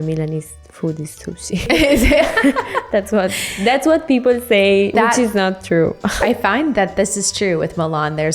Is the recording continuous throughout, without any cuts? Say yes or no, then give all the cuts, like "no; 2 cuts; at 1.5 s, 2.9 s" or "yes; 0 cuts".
no; 3 cuts; at 1.7 s, 4.9 s, 6.2 s